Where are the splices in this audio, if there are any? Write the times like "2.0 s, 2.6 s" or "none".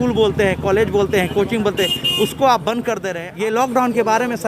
3.2 s